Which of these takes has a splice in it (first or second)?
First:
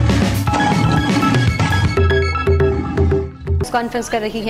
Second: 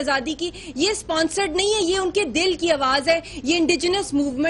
second